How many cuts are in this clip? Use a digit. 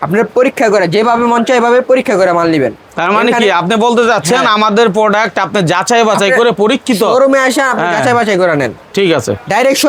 0